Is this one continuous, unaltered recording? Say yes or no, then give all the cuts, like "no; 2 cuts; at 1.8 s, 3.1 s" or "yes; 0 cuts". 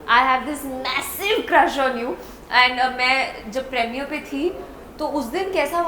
yes; 0 cuts